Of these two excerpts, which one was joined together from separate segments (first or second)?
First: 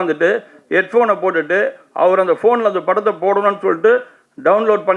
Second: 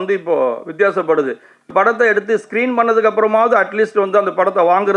second